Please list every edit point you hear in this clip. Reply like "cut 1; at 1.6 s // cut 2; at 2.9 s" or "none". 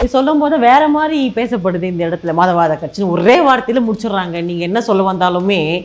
none